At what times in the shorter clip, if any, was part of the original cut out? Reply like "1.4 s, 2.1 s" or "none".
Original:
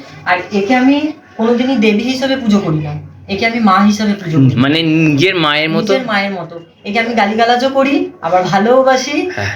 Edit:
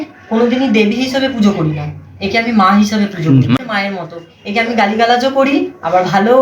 3.6 s